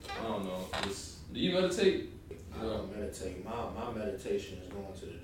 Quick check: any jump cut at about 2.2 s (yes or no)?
yes